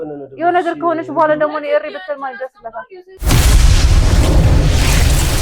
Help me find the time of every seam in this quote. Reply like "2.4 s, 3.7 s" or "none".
3.2 s